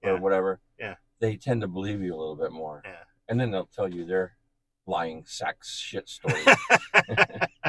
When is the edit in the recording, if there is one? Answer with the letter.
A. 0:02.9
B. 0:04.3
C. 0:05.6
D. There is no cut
D